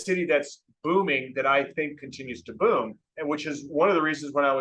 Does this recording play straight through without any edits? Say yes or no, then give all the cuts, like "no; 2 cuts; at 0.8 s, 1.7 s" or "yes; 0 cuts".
no; 1 cut; at 3.1 s